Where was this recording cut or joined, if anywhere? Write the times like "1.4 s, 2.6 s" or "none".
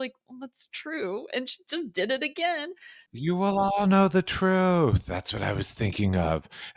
3.2 s